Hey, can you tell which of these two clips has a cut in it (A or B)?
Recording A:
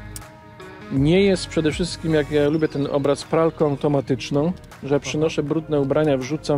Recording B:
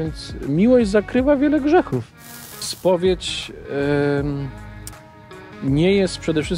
B